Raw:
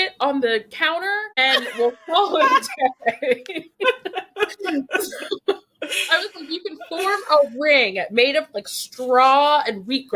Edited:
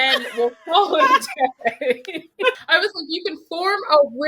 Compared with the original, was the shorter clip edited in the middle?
yes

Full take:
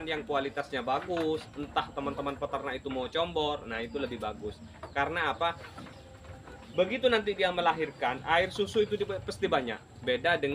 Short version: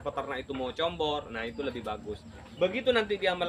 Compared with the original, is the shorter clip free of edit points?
no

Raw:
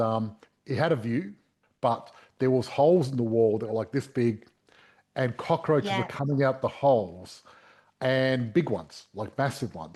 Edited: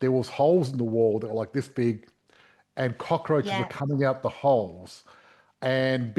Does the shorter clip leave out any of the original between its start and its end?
no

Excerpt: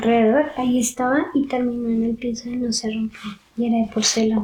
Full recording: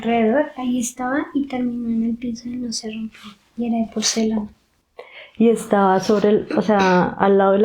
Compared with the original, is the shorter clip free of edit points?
yes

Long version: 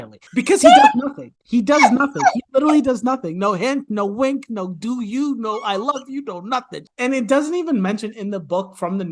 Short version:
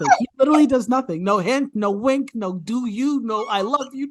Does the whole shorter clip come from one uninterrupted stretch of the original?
yes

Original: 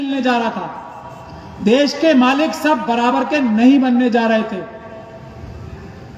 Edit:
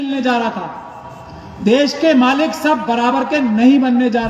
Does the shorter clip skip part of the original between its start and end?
no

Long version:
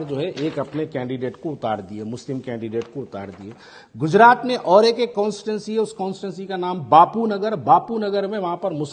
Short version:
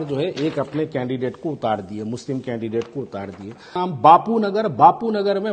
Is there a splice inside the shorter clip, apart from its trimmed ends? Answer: yes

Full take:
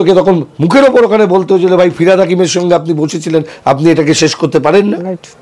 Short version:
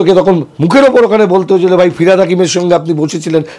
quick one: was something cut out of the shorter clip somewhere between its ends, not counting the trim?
no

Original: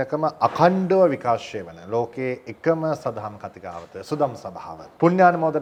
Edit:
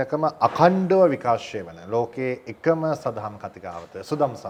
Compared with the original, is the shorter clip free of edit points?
yes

